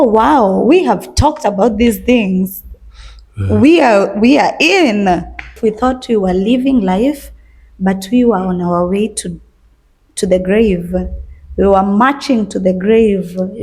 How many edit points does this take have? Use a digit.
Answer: 1